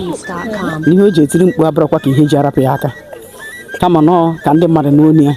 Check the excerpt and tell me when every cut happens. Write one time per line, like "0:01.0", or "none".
none